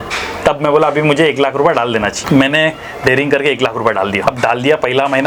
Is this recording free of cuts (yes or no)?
no